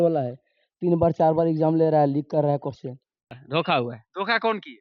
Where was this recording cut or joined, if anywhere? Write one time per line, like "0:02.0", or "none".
0:03.4